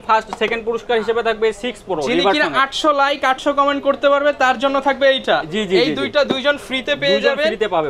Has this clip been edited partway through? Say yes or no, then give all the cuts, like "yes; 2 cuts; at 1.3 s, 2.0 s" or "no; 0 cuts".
no; 0 cuts